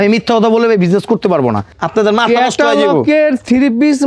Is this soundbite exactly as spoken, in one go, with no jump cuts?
no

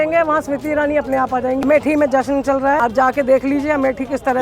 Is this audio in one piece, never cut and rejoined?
no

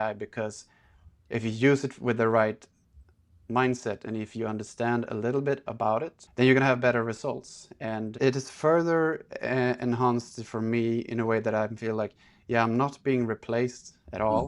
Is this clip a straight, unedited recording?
no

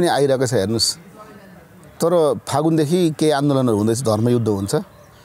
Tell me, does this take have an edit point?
no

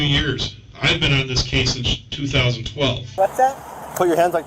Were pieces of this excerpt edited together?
yes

